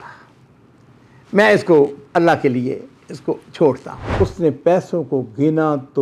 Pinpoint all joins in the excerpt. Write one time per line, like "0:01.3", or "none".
0:04.0